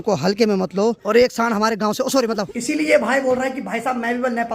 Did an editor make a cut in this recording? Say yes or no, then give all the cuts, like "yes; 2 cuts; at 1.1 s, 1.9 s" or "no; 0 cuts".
yes; 2 cuts; at 1.0 s, 2.6 s